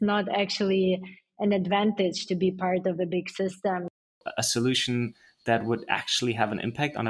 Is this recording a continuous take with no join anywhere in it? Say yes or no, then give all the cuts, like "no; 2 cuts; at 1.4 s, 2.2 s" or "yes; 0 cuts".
no; 1 cut; at 4.1 s